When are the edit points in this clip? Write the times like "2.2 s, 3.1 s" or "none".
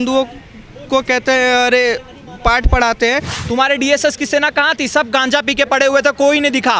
3.4 s

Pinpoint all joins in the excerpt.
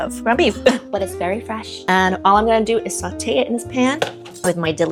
none

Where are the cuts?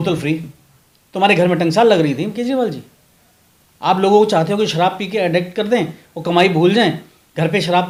none

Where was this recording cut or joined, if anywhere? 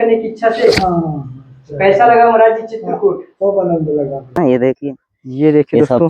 4.4 s

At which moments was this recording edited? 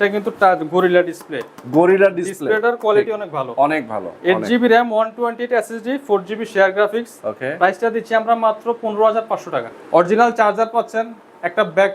9.7 s

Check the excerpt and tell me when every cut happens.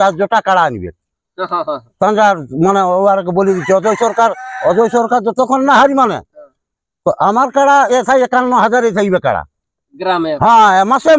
none

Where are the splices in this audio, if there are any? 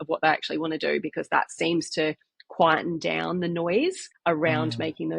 4.1 s

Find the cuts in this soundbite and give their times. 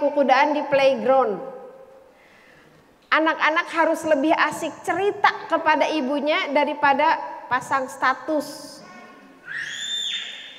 none

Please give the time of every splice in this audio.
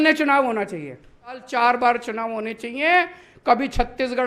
1.4 s

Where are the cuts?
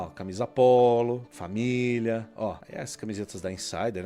1.3 s, 2.6 s

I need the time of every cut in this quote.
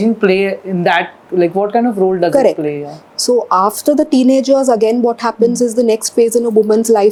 none

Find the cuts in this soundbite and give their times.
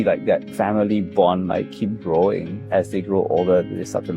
2.6 s

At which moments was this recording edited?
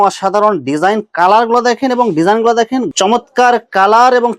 2.9 s

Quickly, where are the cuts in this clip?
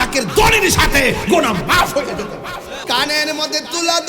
2.8 s

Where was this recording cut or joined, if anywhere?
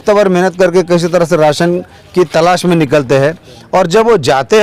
none

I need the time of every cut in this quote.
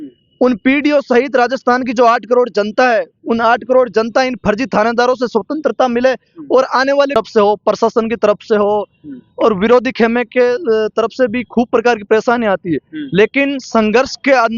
7.1 s

